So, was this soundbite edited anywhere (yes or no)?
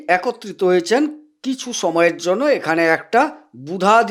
no